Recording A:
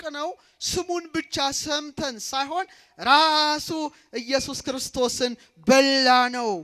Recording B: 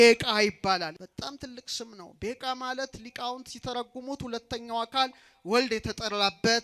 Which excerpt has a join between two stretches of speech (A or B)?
B